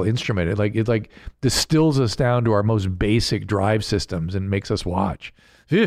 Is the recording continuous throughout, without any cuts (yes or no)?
yes